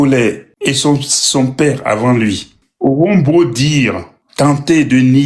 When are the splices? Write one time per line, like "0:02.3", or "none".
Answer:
none